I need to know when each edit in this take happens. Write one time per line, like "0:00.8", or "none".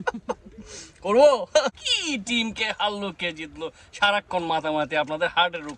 0:01.7